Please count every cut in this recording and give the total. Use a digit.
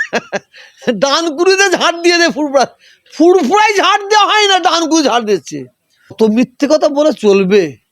1